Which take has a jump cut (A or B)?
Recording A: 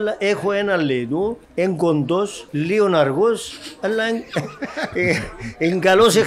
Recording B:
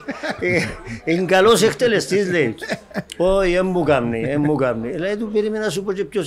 A